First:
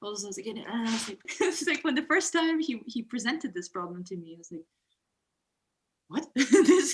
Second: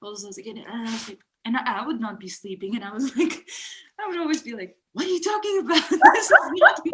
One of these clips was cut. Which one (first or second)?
first